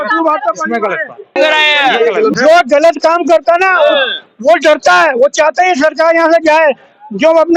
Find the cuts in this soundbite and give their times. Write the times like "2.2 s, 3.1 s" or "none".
1.3 s